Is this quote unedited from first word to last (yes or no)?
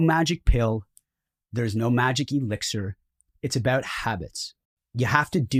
yes